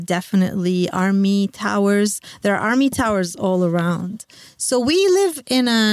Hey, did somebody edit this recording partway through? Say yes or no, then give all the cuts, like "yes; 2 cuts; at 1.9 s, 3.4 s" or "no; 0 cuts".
no; 0 cuts